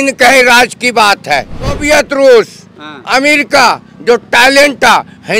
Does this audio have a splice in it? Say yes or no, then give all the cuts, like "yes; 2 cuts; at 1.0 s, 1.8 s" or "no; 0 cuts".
yes; 1 cut; at 1.8 s